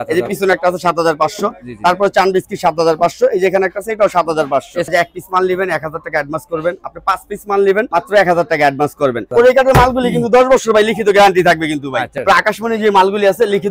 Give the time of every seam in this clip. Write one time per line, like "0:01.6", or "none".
0:04.9
0:09.3
0:12.2